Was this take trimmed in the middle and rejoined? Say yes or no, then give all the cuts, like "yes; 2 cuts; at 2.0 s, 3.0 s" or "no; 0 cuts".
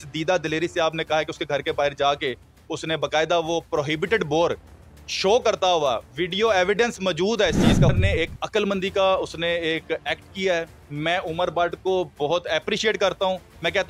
yes; 1 cut; at 7.9 s